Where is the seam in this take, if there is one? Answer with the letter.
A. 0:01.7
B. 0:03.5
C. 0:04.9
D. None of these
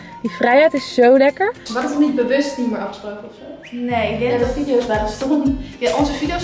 A